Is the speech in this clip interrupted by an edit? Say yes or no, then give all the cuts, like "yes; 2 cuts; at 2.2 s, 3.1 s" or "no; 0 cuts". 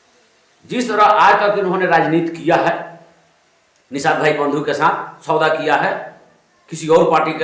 no; 0 cuts